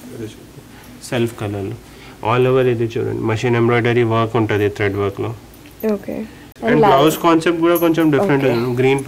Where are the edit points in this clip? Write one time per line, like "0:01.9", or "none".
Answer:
0:06.5